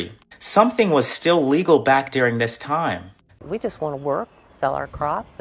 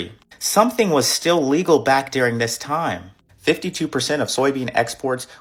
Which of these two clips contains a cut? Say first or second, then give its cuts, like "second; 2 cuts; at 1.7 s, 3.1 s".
first; 1 cut; at 3.3 s